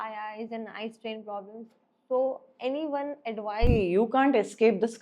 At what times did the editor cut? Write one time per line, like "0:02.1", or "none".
0:03.7